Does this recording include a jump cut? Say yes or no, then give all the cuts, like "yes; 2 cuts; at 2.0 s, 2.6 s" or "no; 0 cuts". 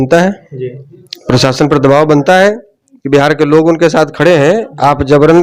no; 0 cuts